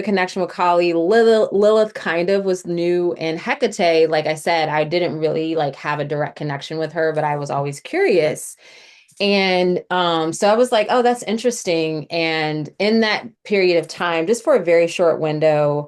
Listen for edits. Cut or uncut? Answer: uncut